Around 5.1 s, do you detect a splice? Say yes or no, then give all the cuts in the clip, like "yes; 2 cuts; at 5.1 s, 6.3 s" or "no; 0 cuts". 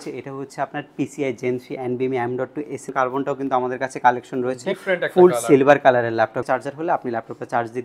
no; 2 cuts; at 2.9 s, 6.4 s